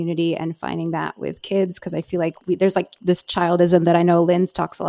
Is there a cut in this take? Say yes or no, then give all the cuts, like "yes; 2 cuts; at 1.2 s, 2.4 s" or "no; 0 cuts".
yes; 1 cut; at 2.4 s